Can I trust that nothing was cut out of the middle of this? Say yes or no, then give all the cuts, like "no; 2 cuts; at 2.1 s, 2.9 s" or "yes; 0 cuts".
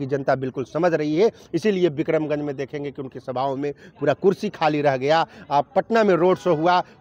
yes; 0 cuts